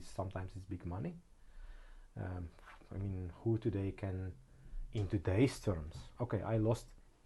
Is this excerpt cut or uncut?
uncut